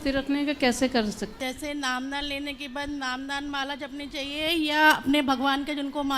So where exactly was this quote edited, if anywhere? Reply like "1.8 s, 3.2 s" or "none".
1.3 s